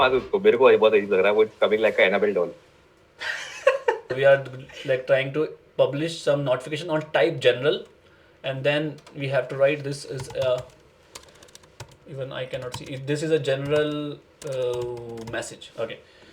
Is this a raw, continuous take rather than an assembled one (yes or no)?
no